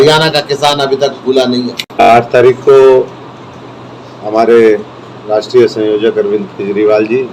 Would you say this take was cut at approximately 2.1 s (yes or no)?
yes